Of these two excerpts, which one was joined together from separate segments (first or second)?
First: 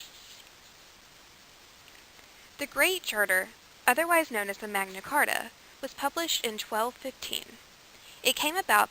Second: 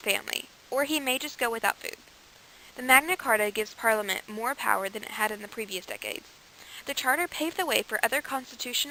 first